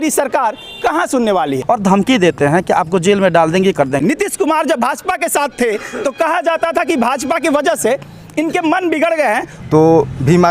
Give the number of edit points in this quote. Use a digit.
3